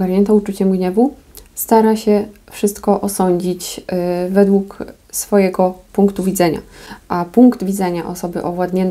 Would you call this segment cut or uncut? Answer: uncut